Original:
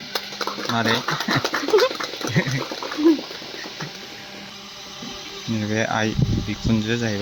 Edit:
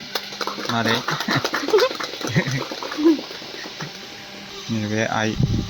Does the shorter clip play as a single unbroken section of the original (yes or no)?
no